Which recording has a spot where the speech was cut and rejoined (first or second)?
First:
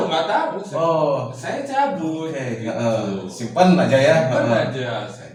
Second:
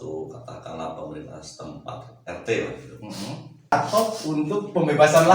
second